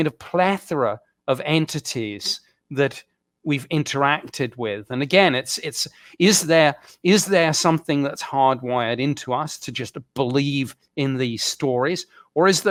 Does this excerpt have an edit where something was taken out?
no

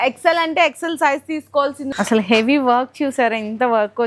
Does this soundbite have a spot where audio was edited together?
yes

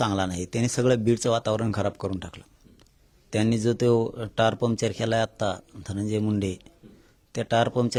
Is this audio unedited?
yes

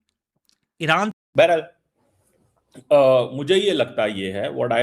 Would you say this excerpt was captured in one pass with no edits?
no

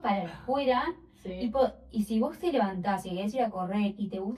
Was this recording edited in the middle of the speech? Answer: no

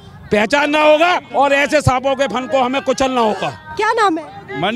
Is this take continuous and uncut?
yes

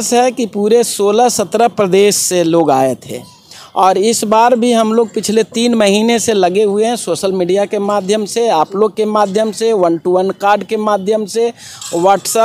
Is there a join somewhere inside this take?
no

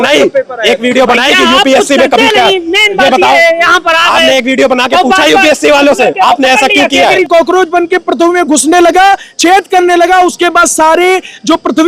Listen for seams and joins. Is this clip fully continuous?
no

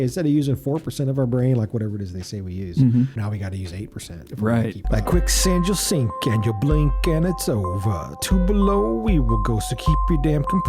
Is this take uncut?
no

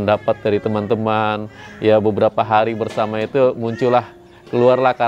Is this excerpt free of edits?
yes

